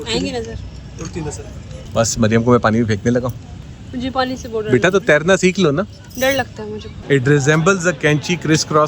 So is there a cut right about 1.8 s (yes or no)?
yes